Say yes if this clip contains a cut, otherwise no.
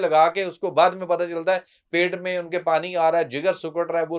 no